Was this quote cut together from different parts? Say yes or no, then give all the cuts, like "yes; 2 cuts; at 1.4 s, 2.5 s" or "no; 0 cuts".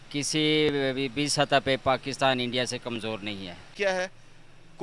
yes; 1 cut; at 3.7 s